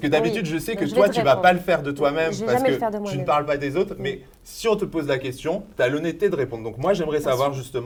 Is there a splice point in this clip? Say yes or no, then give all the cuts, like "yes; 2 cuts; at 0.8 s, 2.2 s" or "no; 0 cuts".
no; 0 cuts